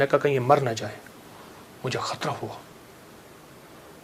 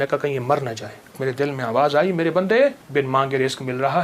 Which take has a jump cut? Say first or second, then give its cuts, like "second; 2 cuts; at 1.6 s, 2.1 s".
second; 2 cuts; at 1.2 s, 2.8 s